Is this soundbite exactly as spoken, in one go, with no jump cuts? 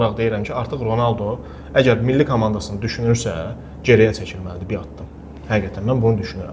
yes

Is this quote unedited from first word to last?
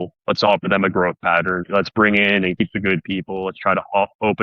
no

